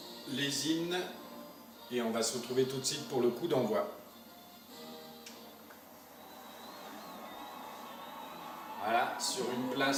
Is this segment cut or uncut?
uncut